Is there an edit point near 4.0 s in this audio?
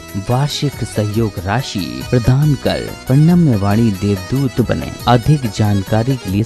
no; 0 cuts

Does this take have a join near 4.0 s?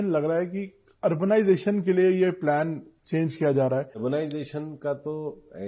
yes; 1 cut; at 4.0 s

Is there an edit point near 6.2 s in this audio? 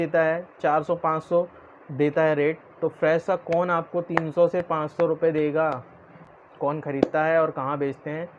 yes; 1 cut; at 6.2 s

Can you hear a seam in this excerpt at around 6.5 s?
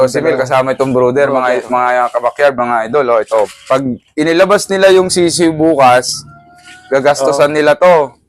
no; 1 cut; at 3.6 s

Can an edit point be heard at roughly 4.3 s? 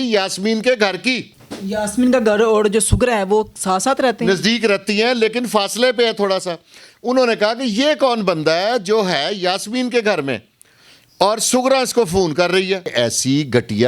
no; 1 cut; at 12.9 s

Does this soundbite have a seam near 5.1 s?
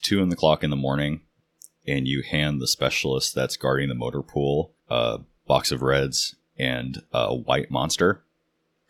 yes; 1 cut; at 5.1 s

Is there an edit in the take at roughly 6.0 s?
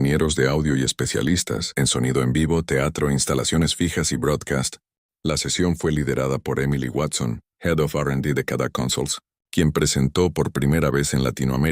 yes; 1 cut; at 6.0 s

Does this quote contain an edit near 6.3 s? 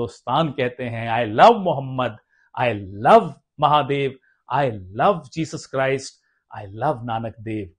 no; 0 cuts

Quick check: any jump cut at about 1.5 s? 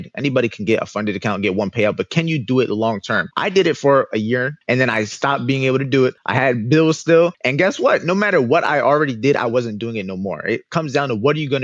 no; 4 cuts; at 3.3 s, 4.6 s, 6.2 s, 7.4 s

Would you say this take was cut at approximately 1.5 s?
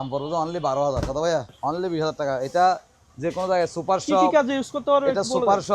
yes; 1 cut; at 1.5 s

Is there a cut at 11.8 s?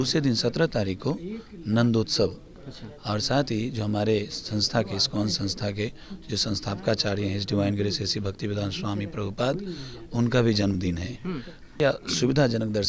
yes; 1 cut; at 11.8 s

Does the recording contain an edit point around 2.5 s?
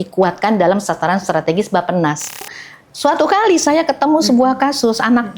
yes; 1 cut; at 2.5 s

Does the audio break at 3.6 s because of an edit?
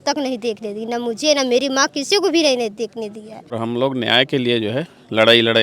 yes; 1 cut; at 3.6 s

